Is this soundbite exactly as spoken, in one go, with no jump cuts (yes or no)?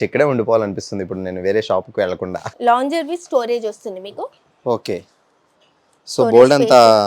no